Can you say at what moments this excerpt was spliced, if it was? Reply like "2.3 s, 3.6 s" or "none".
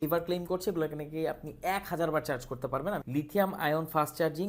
none

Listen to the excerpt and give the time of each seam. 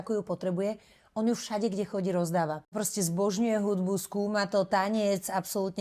2.7 s

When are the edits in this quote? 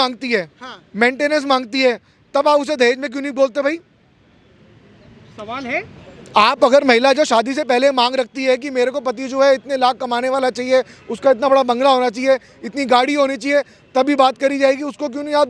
none

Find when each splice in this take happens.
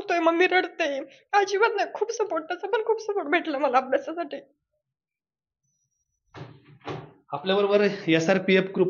none

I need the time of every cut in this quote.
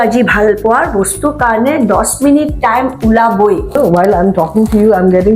3.8 s

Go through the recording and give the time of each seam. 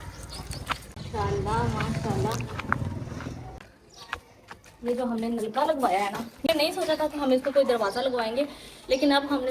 0.9 s, 3.6 s, 6.5 s

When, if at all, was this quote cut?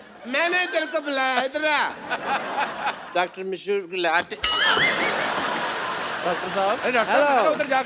3.0 s

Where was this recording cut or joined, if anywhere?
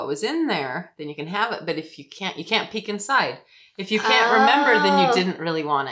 none

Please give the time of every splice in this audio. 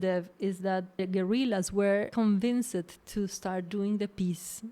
1.0 s, 2.1 s

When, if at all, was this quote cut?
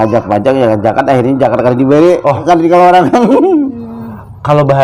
none

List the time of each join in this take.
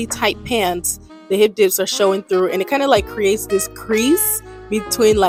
none

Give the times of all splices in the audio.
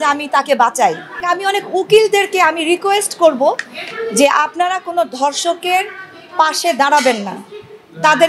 1.2 s

